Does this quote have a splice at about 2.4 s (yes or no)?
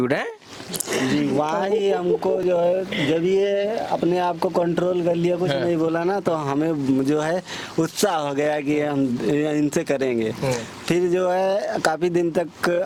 no